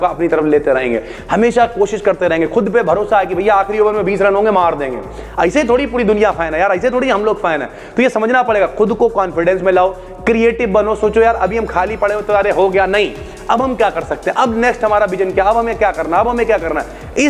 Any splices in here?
no; 0 cuts

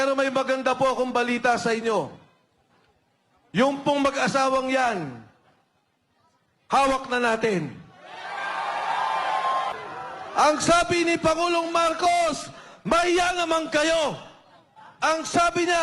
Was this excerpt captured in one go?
no; 1 cut; at 9.7 s

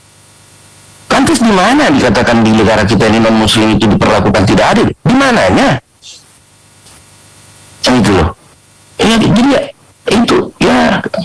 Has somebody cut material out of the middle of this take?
no; 0 cuts

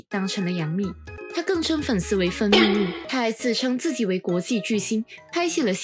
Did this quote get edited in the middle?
yes; 2 cuts; at 1.1 s, 3.0 s

